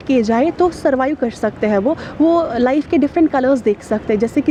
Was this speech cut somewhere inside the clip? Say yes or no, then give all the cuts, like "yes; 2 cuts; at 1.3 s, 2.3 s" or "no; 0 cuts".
no; 0 cuts